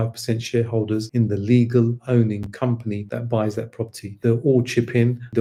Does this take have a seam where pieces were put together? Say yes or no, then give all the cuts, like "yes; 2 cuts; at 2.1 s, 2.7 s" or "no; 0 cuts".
no; 0 cuts